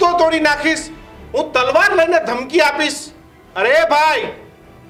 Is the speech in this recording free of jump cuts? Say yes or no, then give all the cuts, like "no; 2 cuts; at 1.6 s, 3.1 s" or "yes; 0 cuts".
yes; 0 cuts